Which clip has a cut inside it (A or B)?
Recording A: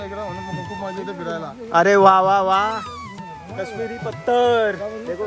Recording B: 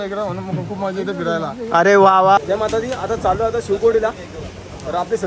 B